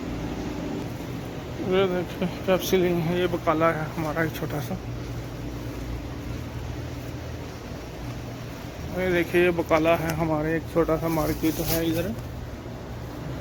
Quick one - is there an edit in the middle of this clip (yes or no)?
no